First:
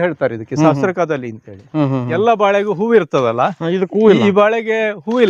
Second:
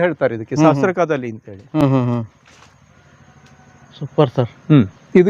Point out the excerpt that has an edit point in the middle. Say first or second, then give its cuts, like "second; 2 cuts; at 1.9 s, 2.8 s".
first; 1 cut; at 1.8 s